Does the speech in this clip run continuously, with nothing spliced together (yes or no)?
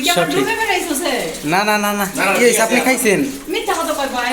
yes